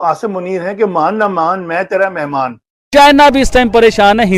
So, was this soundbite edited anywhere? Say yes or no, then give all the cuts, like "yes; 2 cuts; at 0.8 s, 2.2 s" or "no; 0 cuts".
yes; 1 cut; at 2.8 s